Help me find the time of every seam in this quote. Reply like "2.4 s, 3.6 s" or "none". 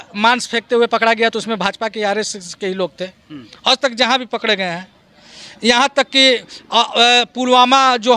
none